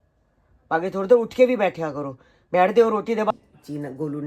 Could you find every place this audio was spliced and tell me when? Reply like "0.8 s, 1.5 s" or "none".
3.3 s